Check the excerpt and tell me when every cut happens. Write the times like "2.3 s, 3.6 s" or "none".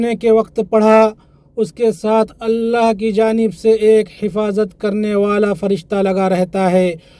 none